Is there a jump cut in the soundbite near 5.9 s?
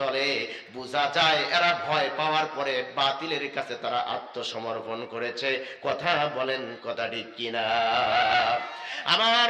no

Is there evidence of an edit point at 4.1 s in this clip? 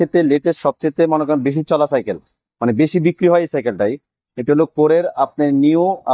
no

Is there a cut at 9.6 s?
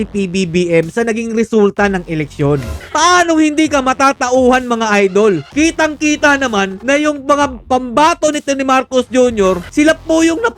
yes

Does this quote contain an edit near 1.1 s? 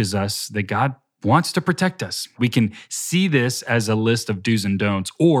yes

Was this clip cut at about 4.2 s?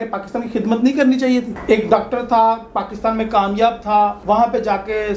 yes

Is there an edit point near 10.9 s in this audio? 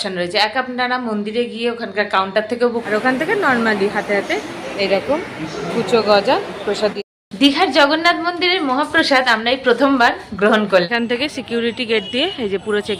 yes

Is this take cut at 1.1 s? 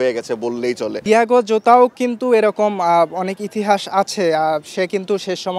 yes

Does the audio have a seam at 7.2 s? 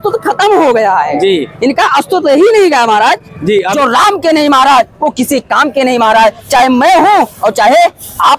no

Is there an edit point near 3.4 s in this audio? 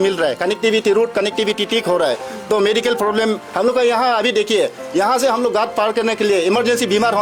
no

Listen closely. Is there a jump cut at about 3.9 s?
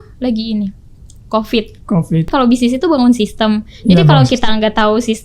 no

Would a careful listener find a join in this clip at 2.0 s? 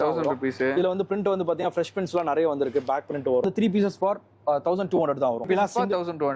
no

